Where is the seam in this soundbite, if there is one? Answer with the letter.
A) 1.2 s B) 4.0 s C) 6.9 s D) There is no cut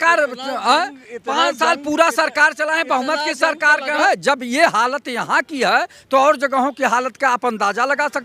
B